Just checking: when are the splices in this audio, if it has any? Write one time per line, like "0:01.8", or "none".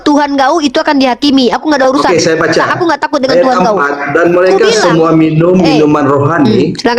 none